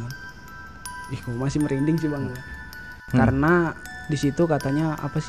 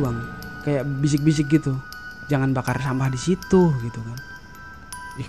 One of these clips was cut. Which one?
first; 1 cut; at 2.9 s

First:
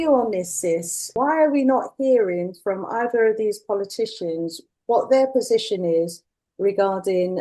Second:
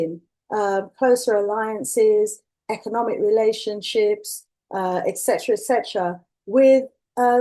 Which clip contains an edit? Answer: first; 2 cuts; at 1.1 s, 4.7 s

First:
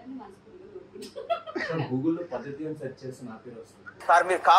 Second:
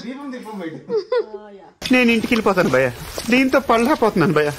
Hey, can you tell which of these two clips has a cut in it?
second; 2 cuts; at 1.7 s, 3.1 s

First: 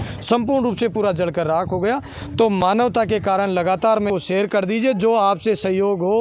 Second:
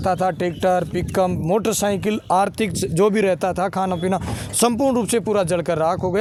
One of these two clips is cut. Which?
first; 1 cut; at 4.1 s

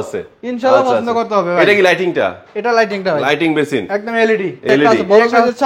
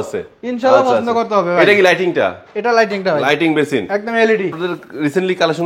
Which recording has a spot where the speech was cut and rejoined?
first; 1 cut; at 4.6 s

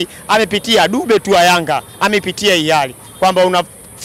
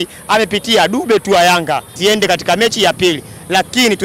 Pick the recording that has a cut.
second; 1 cut; at 1.9 s

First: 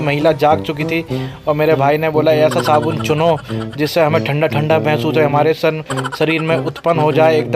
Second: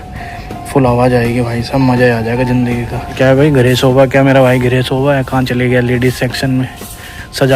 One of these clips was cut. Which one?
second; 1 cut; at 3.1 s

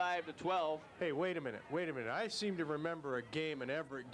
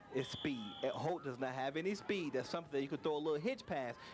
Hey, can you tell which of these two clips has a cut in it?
second; 1 cut; at 2.3 s

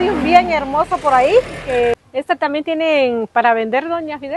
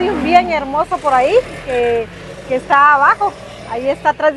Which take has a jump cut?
first; 1 cut; at 1.9 s

